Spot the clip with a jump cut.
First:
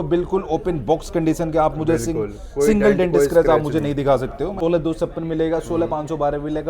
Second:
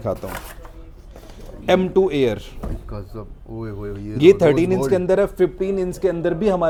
first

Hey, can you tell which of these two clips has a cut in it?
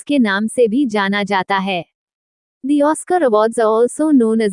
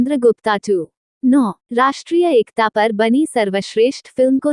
second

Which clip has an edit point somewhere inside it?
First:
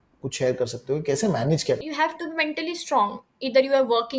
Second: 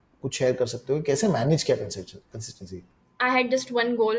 first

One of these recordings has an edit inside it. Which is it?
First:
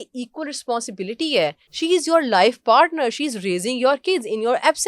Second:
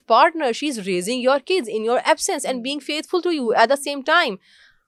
first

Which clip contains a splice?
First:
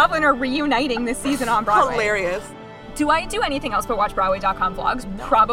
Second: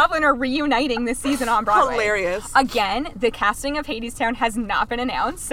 first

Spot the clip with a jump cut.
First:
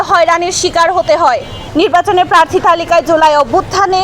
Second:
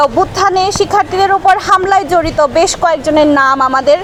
first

